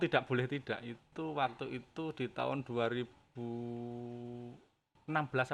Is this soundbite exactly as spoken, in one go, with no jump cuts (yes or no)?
yes